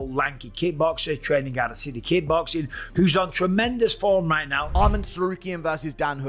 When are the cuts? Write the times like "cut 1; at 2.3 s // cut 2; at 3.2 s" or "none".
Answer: cut 1; at 4.6 s